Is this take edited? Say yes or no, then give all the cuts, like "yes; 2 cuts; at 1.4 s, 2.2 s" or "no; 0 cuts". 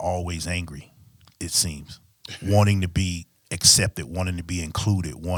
no; 0 cuts